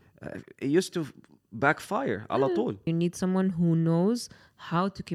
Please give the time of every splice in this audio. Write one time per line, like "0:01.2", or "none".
0:02.9